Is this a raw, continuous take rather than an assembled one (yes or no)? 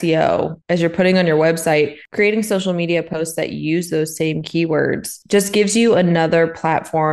yes